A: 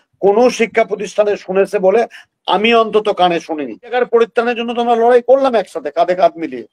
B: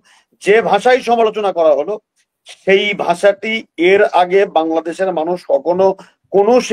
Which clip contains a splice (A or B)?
A